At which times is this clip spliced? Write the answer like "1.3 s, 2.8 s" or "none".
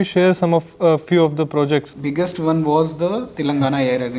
1.9 s